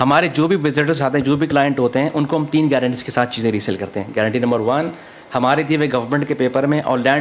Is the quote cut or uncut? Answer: uncut